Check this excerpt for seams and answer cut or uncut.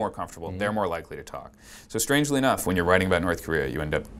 uncut